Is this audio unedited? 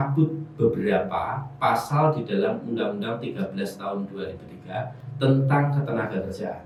yes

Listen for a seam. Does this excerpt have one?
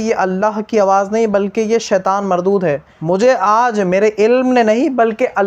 yes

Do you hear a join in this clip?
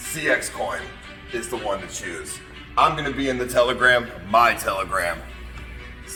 no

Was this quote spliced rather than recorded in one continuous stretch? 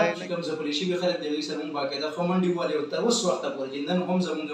no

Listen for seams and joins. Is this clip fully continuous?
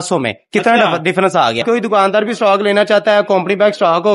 no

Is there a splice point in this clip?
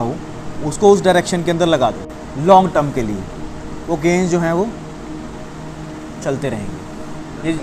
no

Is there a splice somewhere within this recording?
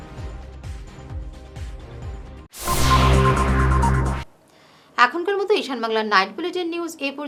no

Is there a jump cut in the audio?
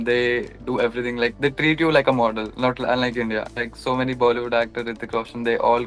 yes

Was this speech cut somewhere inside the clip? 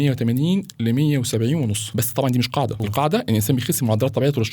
yes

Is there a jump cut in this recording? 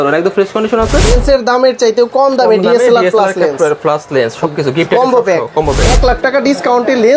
yes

